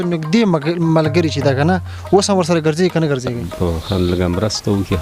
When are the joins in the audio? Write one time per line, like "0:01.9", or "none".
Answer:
0:03.4

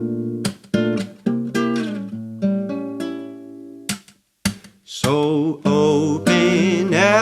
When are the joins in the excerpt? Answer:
0:01.1

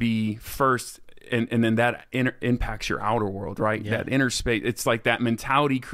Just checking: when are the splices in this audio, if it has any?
none

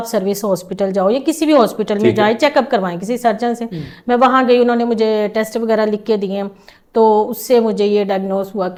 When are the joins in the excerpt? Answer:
none

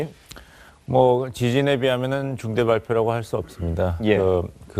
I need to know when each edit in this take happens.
0:02.8

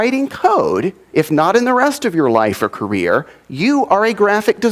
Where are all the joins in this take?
none

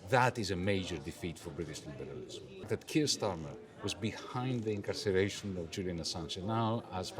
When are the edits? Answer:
0:02.7

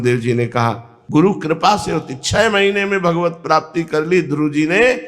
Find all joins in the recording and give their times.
0:01.0

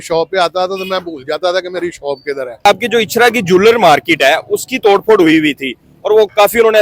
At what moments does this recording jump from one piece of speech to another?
0:02.7

